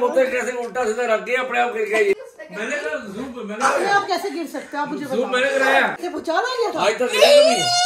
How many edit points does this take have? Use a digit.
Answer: 2